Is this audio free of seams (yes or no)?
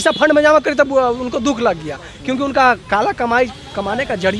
yes